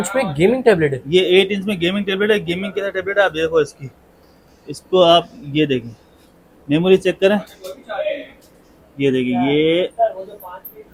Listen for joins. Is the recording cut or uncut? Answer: uncut